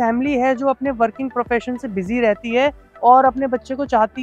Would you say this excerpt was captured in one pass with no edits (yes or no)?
yes